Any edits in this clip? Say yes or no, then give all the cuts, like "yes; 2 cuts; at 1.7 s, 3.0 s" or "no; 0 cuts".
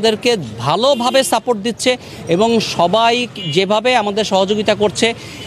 no; 0 cuts